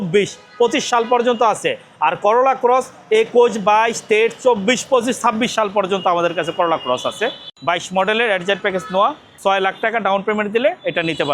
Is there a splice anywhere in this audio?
yes; 1 cut; at 7.5 s

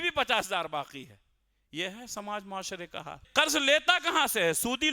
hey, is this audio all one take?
no; 1 cut; at 3.2 s

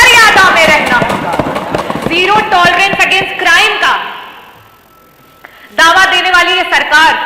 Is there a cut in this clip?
no; 0 cuts

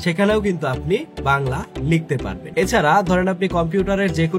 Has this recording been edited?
yes; 1 cut; at 1.1 s

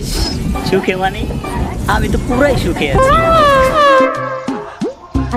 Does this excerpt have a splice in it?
yes; 1 cut; at 3.8 s

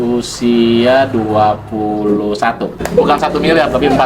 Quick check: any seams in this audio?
yes; 1 cut; at 2.8 s

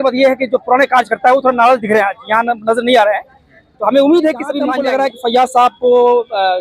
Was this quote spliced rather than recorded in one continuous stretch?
yes; 1 cut; at 4.7 s

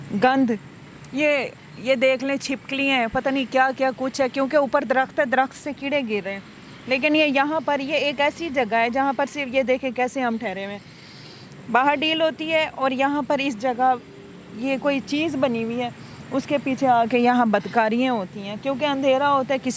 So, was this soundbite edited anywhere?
no; 0 cuts

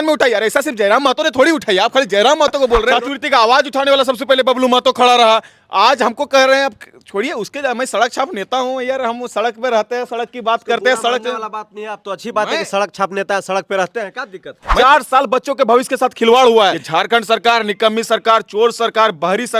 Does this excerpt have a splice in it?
yes; 3 cuts; at 2.9 s, 14.6 s, 16.8 s

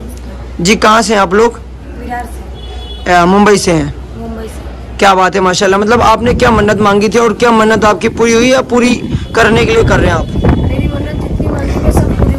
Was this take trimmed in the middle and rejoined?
no; 0 cuts

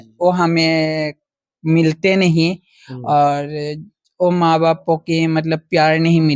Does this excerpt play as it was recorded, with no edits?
yes; 0 cuts

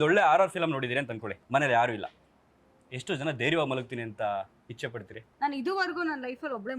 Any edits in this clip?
yes; 2 cuts; at 1.3 s, 5.2 s

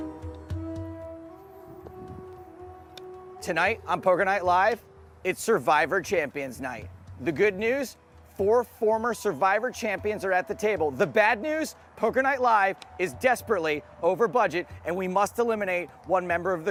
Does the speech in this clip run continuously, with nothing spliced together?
yes; 0 cuts

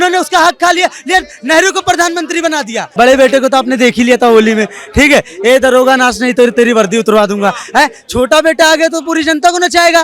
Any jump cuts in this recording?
yes; 1 cut; at 2.9 s

